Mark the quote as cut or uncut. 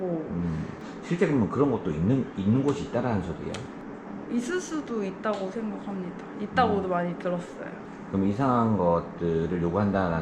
uncut